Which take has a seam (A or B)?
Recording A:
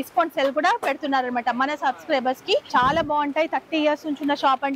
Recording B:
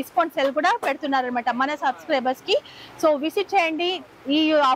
A